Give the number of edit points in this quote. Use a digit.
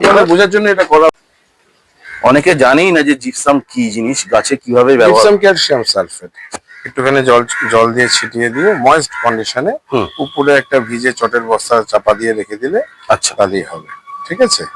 2